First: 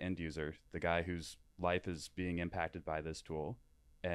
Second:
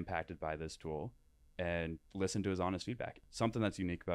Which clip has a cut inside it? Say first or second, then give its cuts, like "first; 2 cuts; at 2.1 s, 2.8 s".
second; 1 cut; at 3.1 s